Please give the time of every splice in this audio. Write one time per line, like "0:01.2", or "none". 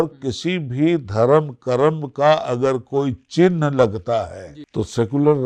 none